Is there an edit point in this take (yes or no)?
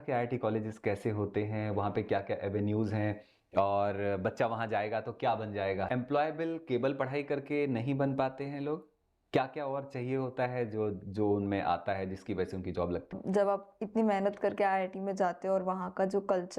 yes